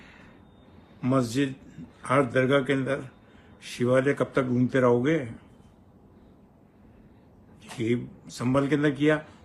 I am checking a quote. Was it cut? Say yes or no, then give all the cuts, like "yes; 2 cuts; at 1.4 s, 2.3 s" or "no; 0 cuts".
no; 0 cuts